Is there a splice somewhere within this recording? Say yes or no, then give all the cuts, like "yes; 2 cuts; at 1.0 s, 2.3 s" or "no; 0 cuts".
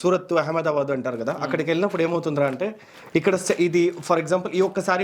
no; 0 cuts